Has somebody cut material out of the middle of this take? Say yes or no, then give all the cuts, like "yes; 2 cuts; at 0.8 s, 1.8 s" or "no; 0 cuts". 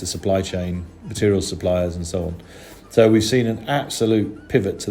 no; 0 cuts